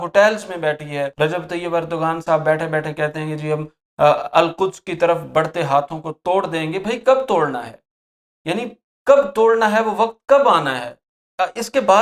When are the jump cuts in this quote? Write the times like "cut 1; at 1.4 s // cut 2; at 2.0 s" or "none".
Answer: cut 1; at 1.1 s